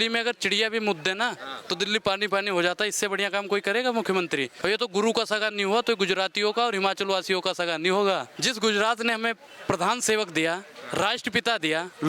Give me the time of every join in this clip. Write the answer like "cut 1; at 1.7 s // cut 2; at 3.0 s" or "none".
cut 1; at 4.5 s // cut 2; at 8.3 s